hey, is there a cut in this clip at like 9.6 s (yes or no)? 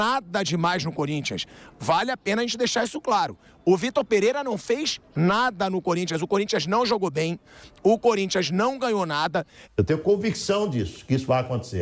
yes